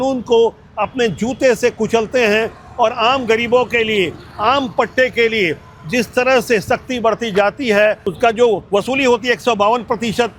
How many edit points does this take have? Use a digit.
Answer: 0